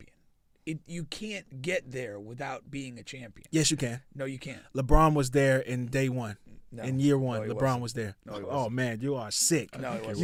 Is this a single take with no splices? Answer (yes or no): yes